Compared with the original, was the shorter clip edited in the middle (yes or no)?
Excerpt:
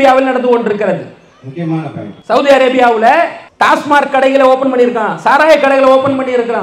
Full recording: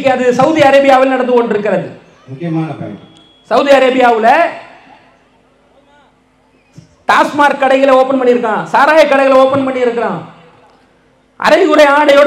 yes